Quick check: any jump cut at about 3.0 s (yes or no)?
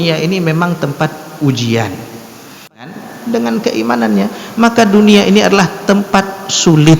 yes